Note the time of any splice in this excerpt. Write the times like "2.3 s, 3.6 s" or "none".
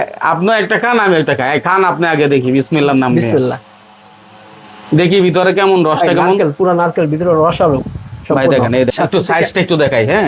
8.9 s

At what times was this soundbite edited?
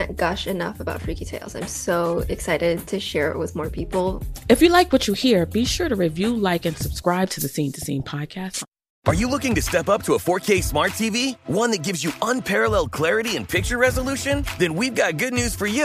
8.9 s

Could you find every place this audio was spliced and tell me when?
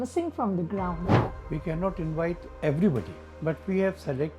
1.2 s, 2.5 s, 3.2 s

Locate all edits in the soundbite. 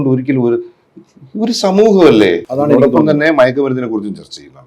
2.5 s

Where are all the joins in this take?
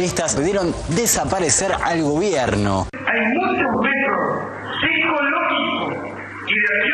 2.9 s

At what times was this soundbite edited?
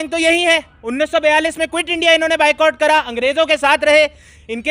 none

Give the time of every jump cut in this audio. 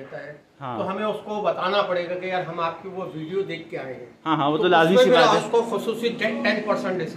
none

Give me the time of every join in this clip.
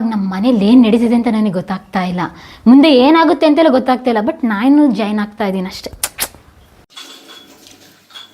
7.0 s

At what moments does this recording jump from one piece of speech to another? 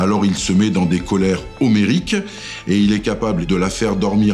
3.4 s

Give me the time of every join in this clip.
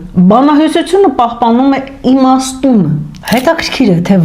3.1 s

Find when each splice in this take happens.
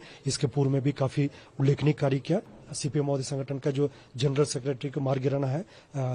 2.5 s

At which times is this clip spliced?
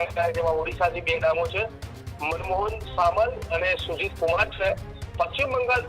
none

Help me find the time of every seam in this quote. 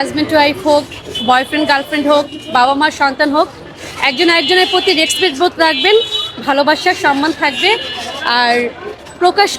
none

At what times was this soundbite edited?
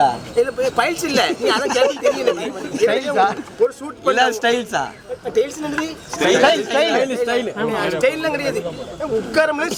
none

